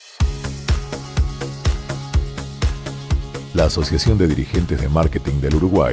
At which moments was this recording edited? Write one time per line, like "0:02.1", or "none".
0:03.1